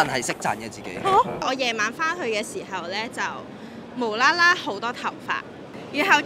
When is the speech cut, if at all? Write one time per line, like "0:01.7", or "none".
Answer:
0:01.4